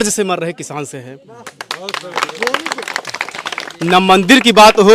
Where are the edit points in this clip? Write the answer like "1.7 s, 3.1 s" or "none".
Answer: none

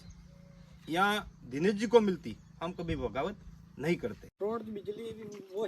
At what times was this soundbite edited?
4.2 s

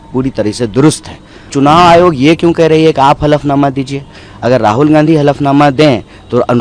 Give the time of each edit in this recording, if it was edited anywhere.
1.5 s

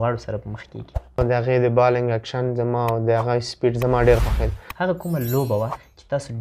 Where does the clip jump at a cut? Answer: 1.2 s, 4.6 s

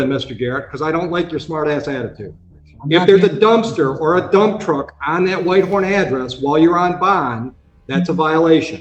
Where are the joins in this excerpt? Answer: none

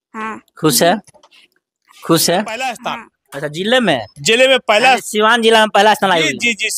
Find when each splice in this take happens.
2.8 s

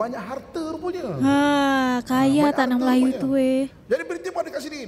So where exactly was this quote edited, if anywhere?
none

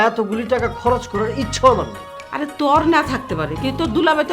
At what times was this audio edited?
none

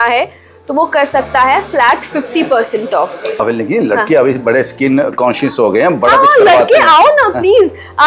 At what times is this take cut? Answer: 3.4 s

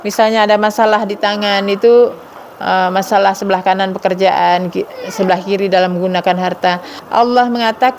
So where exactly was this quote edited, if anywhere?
6.9 s

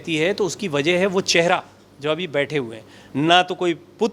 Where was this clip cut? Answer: none

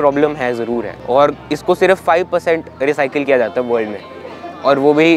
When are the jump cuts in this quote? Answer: 0.9 s

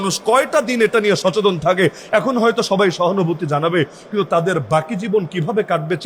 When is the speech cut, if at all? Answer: none

